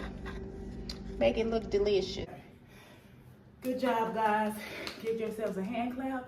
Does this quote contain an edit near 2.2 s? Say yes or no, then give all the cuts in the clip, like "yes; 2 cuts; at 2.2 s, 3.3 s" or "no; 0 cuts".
yes; 1 cut; at 2.2 s